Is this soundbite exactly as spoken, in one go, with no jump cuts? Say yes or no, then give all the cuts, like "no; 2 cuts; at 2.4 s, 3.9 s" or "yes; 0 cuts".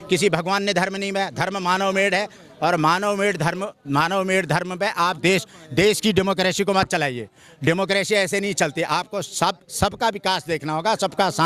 yes; 0 cuts